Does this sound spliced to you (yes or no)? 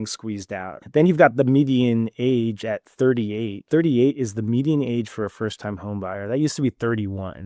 no